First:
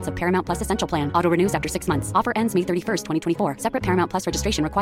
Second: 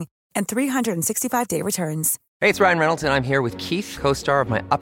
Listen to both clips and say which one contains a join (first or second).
second